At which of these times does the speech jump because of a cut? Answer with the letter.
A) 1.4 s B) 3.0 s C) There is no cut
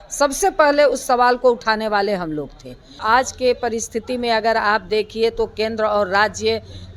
B